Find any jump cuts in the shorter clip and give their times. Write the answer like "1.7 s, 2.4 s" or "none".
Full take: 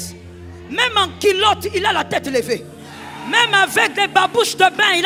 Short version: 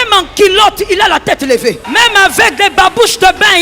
1.8 s

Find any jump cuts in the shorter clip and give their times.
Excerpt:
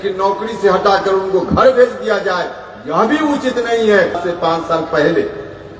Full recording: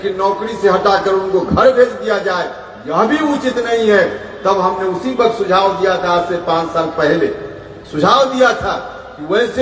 4.2 s

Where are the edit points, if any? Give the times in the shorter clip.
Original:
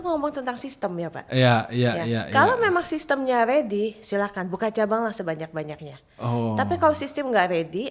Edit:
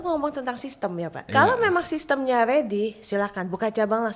1.2 s

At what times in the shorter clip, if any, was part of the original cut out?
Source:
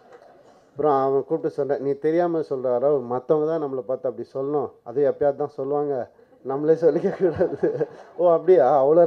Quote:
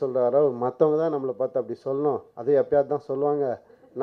none

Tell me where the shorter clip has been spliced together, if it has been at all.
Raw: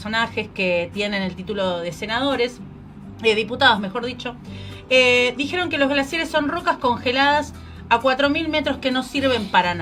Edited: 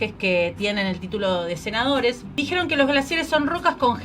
2.4 s

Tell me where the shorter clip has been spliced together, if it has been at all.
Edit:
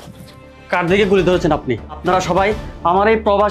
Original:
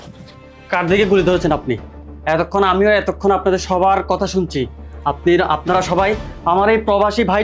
2.0 s

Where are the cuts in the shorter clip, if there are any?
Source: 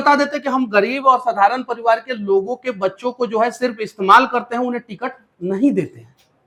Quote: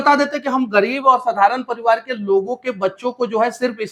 none

